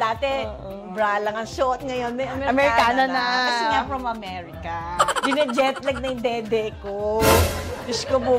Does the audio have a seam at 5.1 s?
yes; 1 cut; at 5.1 s

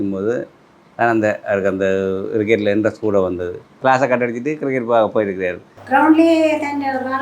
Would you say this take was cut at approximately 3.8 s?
yes; 2 cuts; at 3.8 s, 5.7 s

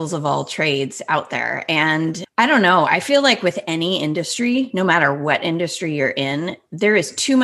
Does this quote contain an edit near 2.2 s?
yes; 1 cut; at 2.2 s

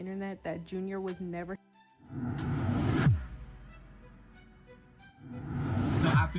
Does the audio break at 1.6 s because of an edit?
yes; 1 cut; at 1.6 s

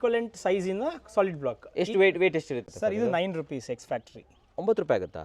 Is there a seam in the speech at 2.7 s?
yes; 1 cut; at 2.7 s

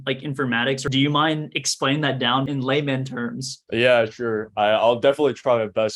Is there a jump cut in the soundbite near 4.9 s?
no; 3 cuts; at 0.8 s, 2.5 s, 3.5 s

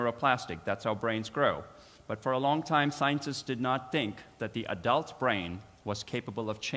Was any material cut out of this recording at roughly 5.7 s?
yes; 1 cut; at 5.7 s

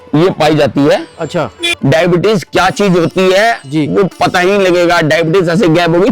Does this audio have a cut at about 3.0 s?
no; 1 cut; at 1.7 s

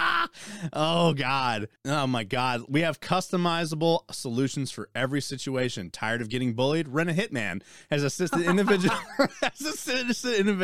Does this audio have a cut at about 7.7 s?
no; 1 cut; at 1.7 s

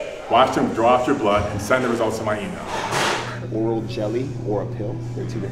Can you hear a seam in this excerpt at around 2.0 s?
no; 1 cut; at 3.3 s

